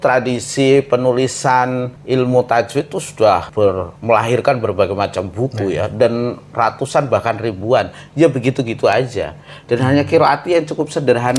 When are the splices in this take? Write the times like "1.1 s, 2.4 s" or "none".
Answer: 1.9 s, 3.6 s